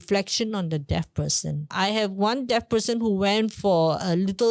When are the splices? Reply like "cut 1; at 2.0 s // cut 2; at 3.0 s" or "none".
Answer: cut 1; at 1.7 s

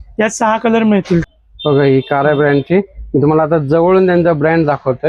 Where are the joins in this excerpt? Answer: cut 1; at 1.3 s

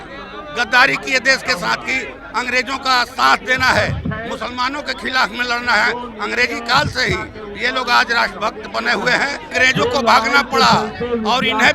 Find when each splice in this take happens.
cut 1; at 9.4 s

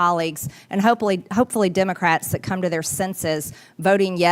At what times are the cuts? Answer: none

